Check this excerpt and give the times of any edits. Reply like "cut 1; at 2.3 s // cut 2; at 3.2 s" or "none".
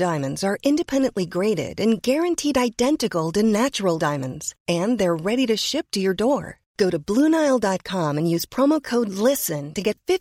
none